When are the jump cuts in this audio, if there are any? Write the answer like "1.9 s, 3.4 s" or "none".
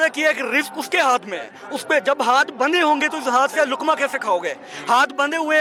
none